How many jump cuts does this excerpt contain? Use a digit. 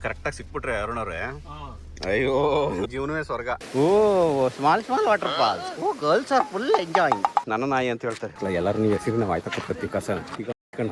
2